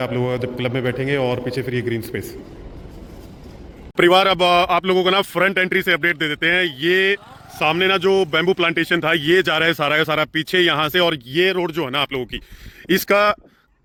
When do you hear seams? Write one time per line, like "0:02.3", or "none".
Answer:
none